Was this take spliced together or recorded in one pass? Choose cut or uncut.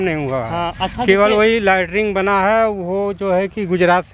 uncut